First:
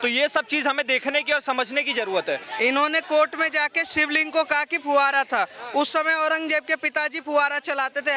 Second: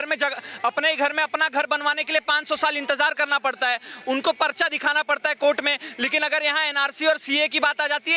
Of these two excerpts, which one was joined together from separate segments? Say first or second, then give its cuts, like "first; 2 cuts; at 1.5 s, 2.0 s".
first; 1 cut; at 2.5 s